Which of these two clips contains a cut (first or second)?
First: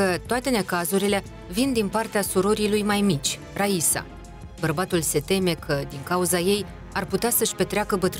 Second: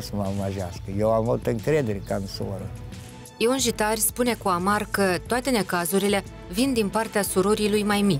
second